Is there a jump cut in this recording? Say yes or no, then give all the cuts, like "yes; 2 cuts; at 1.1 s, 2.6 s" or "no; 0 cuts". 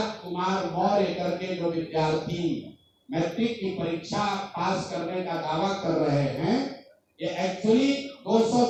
no; 0 cuts